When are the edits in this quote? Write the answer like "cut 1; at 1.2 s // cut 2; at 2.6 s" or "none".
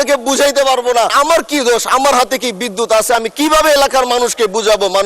cut 1; at 1.1 s